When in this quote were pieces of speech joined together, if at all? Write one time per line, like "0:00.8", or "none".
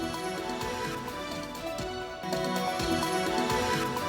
0:02.2

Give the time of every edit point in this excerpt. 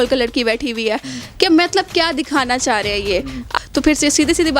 0:03.5

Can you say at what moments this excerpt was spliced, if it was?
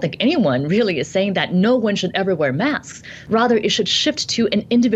0:03.1

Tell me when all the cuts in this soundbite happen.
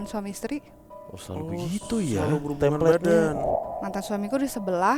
0:03.5

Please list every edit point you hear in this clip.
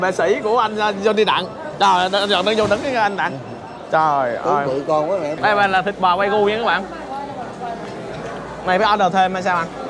0:05.3

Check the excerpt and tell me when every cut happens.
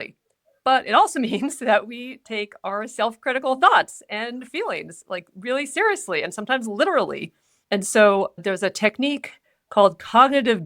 0:07.5

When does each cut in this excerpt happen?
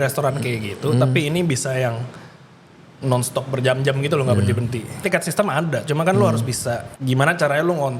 0:05.0
0:06.9

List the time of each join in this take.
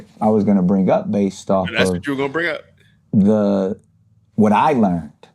0:01.6

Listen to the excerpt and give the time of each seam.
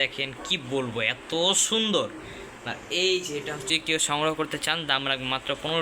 0:03.7

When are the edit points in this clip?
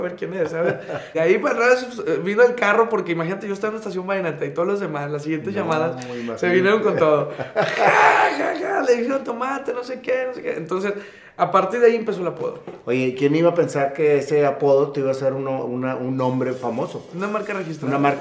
0:01.1

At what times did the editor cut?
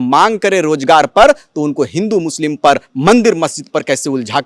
none

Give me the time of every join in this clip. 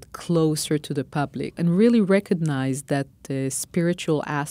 0:01.6

